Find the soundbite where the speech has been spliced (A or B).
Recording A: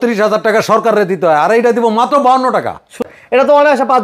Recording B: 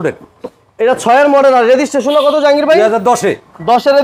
A